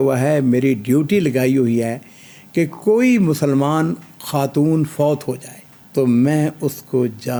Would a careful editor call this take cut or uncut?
uncut